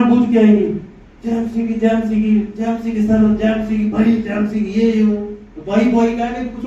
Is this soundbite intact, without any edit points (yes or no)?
yes